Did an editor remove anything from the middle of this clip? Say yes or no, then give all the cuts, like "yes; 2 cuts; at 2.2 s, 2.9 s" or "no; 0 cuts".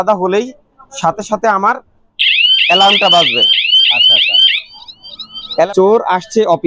yes; 1 cut; at 5.7 s